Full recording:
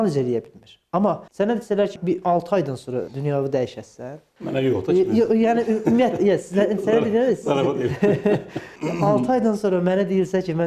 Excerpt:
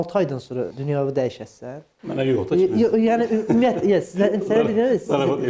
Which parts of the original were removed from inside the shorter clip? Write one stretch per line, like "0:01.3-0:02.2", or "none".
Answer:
none